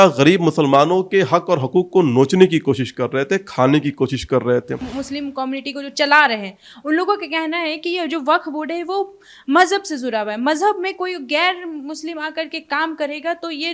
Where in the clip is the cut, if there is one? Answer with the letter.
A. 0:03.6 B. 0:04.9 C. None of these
B